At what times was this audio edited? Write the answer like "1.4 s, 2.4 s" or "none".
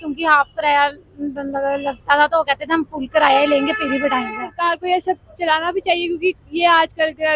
4.5 s